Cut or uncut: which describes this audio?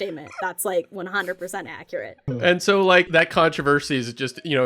cut